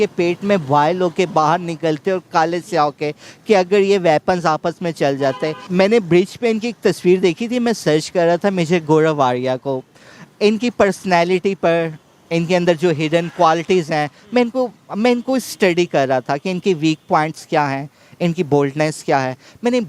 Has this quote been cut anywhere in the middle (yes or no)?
yes